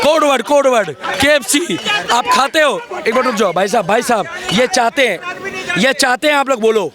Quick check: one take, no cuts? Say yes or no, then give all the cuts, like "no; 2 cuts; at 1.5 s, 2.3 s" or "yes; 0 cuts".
yes; 0 cuts